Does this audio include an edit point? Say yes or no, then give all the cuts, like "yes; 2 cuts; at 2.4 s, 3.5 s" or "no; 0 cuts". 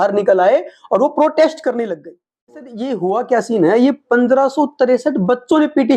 yes; 1 cut; at 2.8 s